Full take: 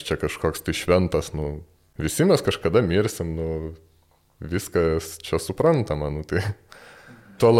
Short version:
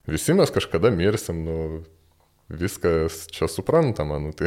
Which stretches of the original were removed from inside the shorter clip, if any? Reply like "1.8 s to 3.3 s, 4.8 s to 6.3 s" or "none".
none